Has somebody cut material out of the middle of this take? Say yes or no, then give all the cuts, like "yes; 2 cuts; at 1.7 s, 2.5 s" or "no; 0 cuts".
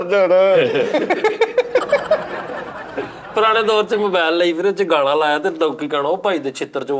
no; 0 cuts